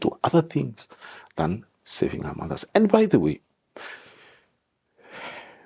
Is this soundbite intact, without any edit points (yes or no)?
yes